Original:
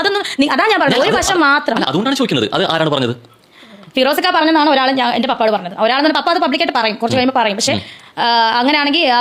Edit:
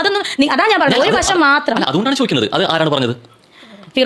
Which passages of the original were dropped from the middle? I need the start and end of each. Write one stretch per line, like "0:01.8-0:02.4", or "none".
none